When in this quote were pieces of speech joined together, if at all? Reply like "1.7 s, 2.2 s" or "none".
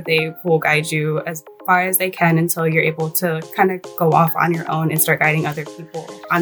none